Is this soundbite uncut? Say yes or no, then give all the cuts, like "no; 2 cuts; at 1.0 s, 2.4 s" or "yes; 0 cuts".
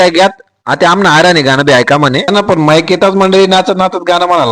yes; 0 cuts